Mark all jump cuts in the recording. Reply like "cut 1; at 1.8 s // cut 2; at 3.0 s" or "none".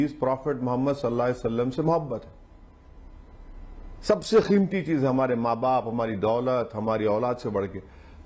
none